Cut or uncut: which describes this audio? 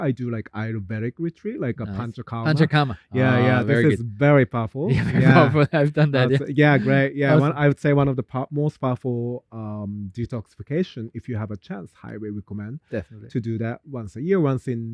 uncut